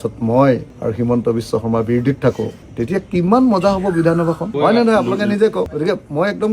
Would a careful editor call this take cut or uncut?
uncut